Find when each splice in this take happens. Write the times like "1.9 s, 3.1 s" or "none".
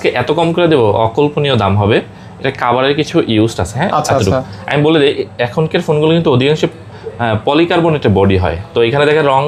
none